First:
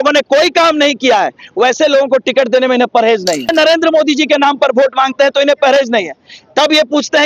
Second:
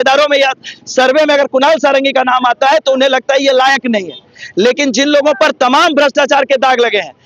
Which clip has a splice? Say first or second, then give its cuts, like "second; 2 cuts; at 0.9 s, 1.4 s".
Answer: first; 1 cut; at 3.5 s